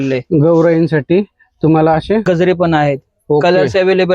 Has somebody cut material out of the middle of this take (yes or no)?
yes